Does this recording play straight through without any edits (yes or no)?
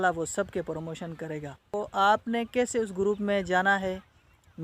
no